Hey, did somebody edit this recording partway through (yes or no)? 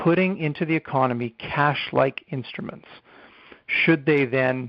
no